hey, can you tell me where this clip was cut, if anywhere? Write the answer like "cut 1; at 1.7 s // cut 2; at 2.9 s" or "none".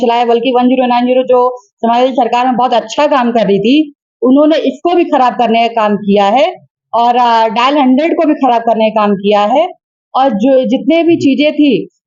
none